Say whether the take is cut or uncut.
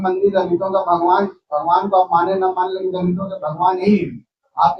uncut